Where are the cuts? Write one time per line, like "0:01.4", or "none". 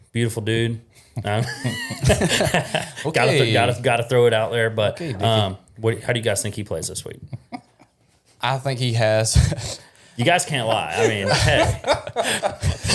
none